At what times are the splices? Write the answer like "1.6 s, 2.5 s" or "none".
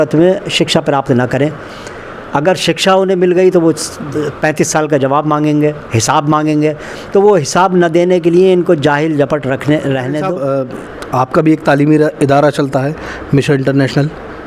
10.2 s